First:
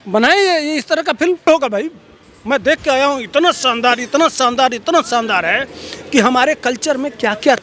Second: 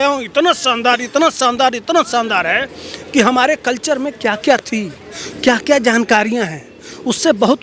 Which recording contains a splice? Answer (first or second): first